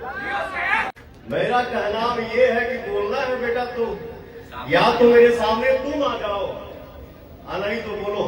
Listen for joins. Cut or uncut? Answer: cut